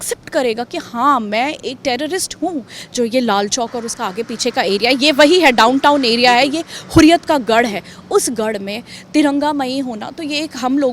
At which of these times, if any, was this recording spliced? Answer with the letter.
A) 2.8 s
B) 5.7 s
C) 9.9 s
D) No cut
A